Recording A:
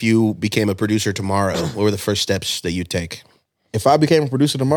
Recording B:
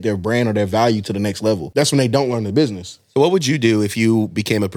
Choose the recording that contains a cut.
B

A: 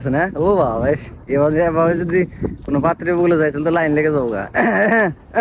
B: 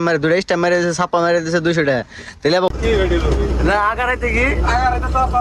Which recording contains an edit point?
B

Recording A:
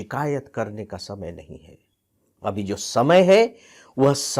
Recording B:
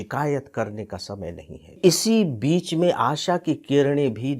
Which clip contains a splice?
B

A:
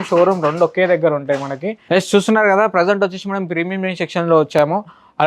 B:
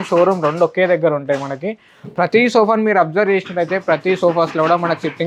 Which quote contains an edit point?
A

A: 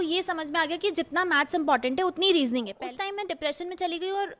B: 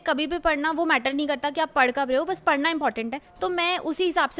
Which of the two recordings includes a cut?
A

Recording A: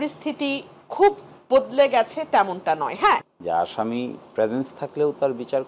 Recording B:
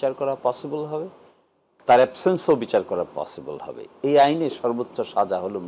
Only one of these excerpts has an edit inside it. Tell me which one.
A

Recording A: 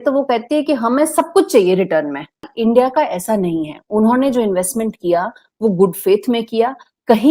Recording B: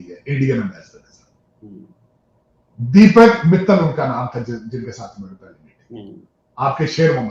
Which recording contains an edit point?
A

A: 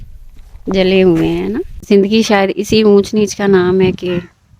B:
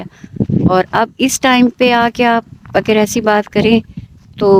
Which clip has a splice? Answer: A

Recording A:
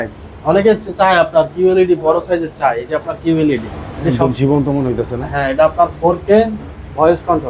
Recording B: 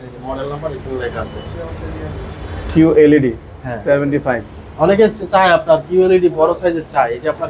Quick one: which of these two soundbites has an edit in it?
A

